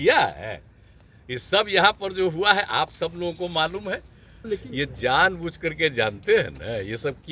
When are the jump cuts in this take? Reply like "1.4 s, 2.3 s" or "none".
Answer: 4.4 s